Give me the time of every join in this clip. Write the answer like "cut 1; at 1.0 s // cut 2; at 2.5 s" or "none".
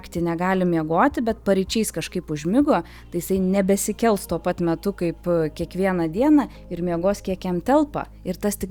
none

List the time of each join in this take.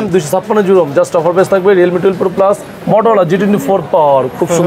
cut 1; at 2.7 s

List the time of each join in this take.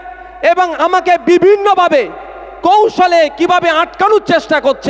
none

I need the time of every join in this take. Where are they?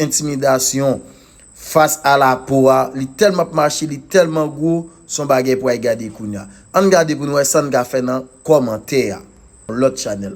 none

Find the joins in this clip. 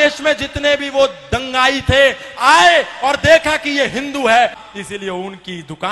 cut 1; at 4.6 s

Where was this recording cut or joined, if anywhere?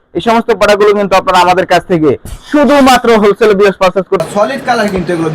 cut 1; at 4.2 s

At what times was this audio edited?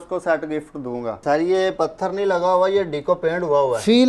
cut 1; at 1.2 s

